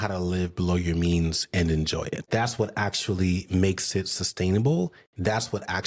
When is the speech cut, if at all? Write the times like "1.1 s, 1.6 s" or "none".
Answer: 2.3 s